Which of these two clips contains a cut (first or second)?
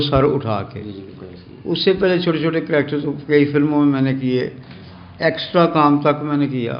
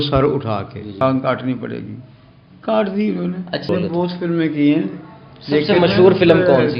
second